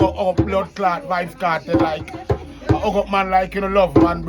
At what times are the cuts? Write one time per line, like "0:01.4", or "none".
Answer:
none